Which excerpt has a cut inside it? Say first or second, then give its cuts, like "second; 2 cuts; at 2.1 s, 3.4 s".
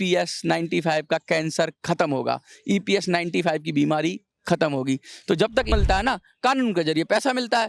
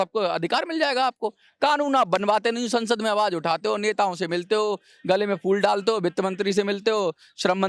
first; 1 cut; at 5.7 s